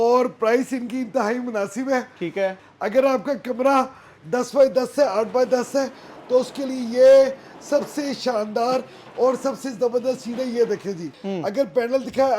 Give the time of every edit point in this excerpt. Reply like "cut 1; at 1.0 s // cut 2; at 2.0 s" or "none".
cut 1; at 2.6 s // cut 2; at 11.1 s